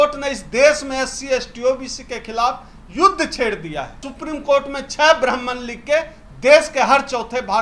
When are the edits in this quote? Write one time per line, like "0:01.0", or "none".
0:04.1